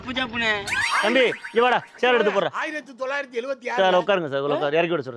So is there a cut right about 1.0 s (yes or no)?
yes